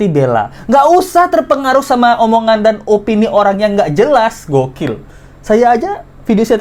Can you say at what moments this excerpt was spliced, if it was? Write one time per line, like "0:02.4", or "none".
none